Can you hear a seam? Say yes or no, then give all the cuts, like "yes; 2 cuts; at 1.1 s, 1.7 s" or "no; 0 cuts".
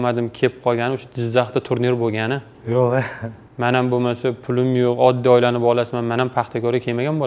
no; 0 cuts